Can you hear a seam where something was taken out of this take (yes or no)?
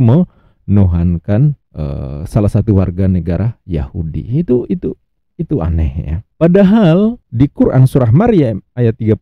no